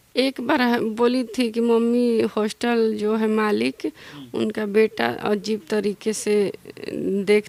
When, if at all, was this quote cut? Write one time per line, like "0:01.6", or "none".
none

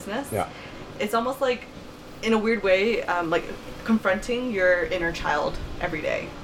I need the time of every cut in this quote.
none

